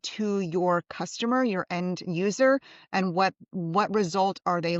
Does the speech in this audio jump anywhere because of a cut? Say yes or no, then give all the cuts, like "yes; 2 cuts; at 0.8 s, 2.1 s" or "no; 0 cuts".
no; 0 cuts